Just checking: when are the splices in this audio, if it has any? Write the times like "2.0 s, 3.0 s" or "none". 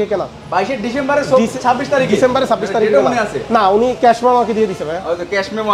none